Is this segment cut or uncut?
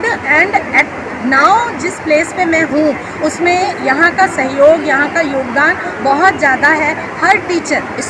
uncut